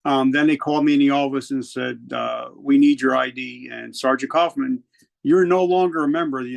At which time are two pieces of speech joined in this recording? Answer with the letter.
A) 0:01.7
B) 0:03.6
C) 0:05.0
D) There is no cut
D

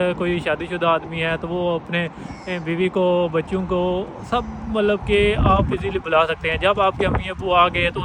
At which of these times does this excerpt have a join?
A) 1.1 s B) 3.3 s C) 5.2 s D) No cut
D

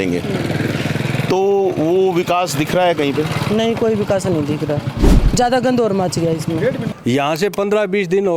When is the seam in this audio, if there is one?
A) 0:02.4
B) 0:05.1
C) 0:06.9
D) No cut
C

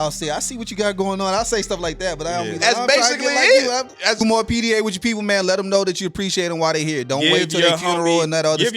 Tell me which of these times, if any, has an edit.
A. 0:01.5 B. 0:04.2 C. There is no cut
B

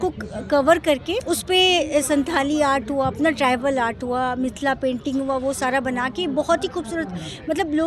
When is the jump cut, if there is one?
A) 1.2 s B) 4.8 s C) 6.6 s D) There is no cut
A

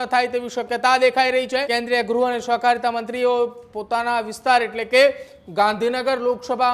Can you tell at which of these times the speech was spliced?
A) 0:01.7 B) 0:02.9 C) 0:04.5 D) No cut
A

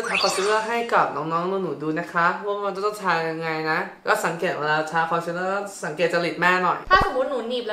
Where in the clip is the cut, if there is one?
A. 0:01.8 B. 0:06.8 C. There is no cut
B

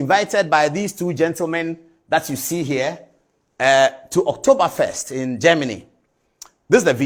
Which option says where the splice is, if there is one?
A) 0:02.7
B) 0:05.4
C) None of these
C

